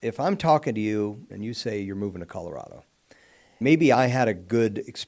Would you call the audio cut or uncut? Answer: cut